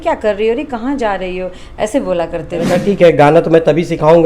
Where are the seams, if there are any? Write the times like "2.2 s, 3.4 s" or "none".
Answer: 2.7 s